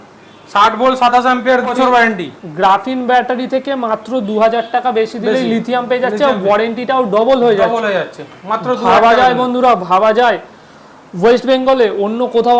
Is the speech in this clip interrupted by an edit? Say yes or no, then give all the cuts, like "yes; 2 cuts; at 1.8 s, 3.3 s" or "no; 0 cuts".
yes; 1 cut; at 1.7 s